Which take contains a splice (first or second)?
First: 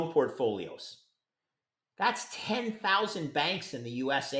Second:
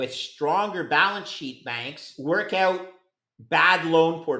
second